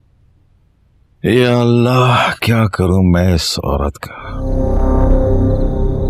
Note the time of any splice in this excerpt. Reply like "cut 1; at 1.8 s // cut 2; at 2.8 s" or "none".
cut 1; at 4.4 s